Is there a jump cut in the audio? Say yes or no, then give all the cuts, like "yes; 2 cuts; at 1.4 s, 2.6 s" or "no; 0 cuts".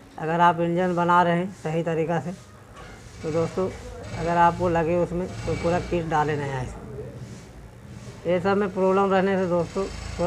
no; 0 cuts